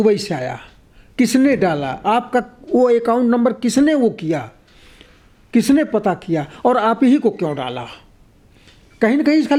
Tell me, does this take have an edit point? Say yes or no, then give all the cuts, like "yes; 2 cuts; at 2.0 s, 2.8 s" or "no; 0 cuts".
no; 0 cuts